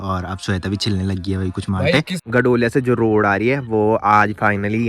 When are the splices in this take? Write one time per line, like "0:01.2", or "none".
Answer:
0:02.2

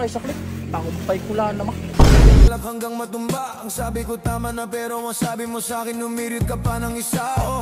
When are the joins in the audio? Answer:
0:02.4

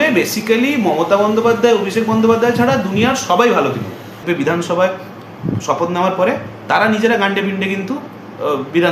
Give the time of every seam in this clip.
0:04.2

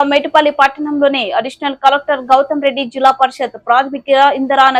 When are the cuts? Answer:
none

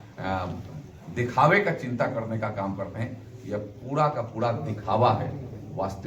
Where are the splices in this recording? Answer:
none

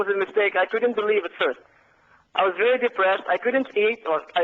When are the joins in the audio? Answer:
none

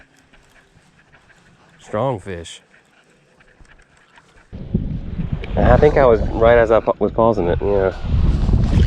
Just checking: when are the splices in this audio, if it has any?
0:04.6

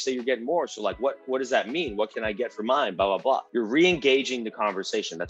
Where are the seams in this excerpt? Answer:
0:03.5

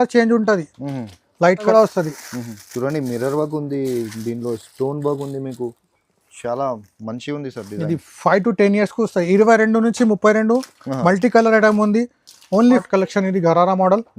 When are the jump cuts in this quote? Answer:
0:01.7
0:12.8

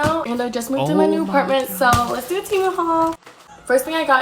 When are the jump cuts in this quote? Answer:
none

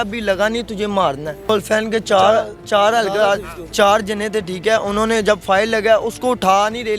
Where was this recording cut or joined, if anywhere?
0:01.5

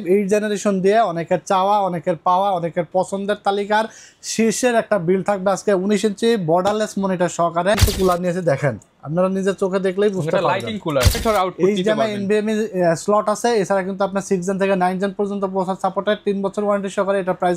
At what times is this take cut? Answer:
0:07.8
0:11.2

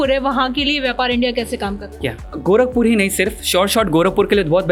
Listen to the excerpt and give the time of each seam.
none

